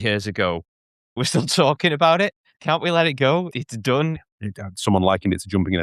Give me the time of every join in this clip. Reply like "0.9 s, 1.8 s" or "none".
1.2 s, 2.5 s, 3.5 s, 4.3 s

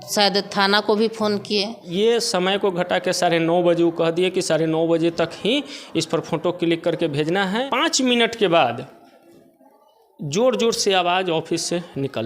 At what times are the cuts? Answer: 1.9 s, 7.7 s

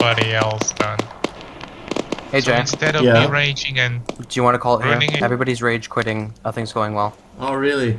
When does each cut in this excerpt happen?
1.4 s, 5.2 s

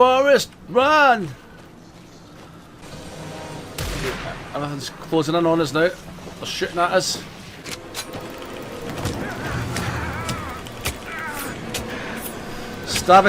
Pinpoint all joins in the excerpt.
2.8 s, 7.6 s

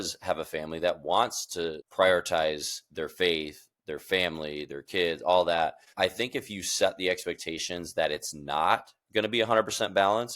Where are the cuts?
1.8 s, 5.9 s

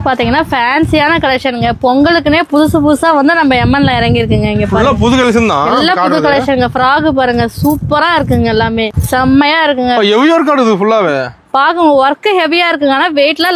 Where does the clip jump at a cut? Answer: 8.9 s

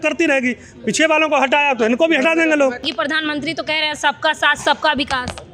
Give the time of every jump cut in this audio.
2.9 s

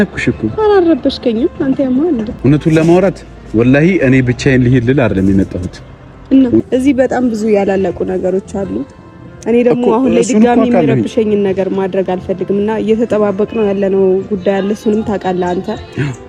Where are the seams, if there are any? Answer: 2.3 s, 6.6 s

